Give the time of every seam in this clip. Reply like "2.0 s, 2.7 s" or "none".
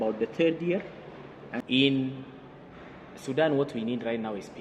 1.4 s